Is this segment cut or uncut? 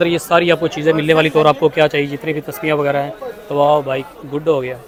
uncut